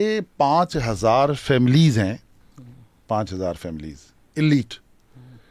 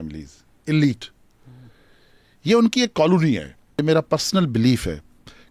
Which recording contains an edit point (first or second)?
second